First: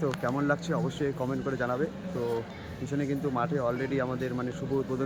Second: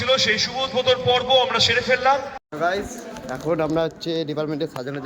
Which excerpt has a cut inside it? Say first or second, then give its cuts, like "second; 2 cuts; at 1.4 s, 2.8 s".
second; 1 cut; at 2.4 s